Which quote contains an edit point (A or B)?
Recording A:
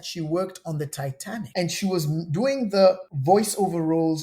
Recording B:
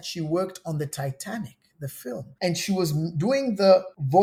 A